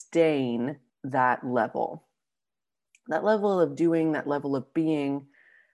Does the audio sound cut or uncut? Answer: cut